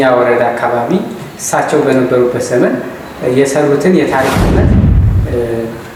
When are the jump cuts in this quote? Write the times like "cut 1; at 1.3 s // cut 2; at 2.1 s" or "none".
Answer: none